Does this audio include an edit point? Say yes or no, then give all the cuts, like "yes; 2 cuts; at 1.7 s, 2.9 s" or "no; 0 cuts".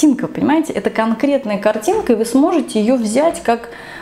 no; 0 cuts